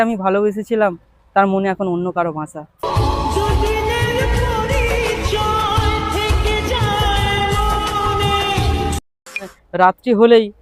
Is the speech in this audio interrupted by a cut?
yes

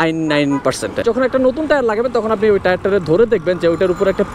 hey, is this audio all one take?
no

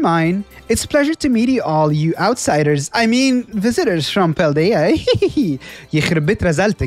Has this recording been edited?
no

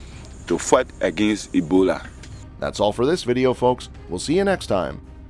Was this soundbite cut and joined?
no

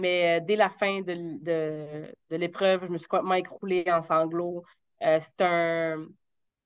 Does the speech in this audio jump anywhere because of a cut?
no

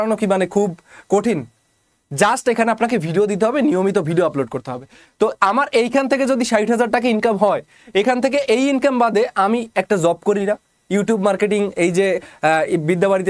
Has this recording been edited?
no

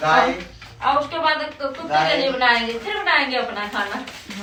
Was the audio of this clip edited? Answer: no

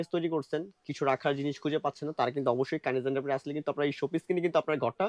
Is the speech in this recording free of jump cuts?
yes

